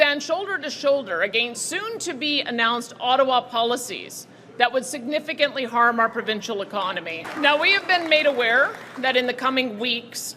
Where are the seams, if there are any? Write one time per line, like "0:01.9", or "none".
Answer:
0:07.3